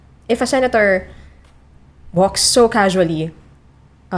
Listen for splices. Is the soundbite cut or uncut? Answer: uncut